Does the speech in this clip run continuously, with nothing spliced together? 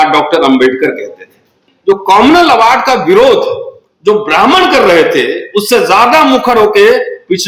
no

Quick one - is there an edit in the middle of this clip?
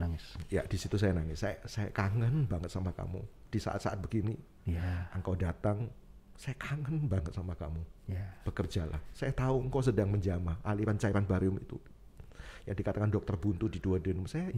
no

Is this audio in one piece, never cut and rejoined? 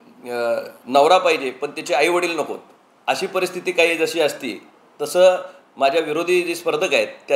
yes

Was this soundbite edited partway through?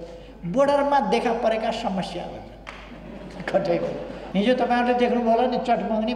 yes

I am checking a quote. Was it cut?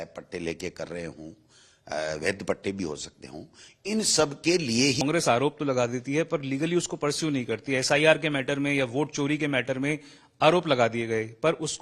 yes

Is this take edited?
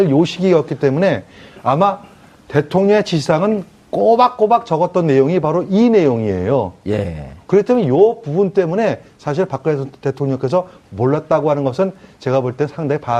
yes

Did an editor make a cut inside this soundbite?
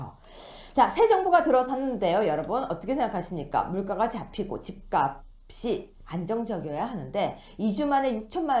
yes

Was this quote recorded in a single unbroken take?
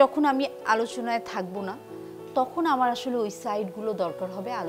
yes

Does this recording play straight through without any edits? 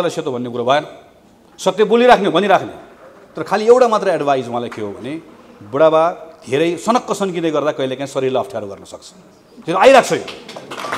yes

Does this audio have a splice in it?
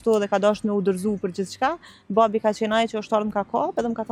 no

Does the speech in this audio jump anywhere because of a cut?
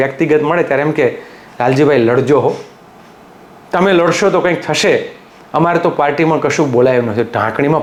no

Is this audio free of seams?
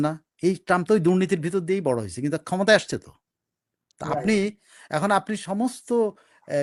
yes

